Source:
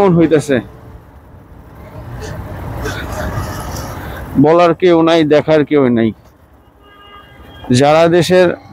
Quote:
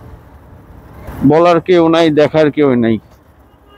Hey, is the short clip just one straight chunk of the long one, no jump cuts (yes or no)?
no